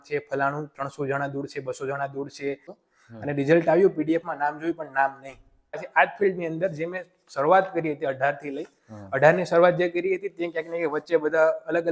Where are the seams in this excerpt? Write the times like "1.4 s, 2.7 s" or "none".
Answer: 2.8 s, 5.9 s